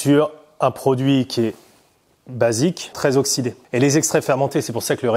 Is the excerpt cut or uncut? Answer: cut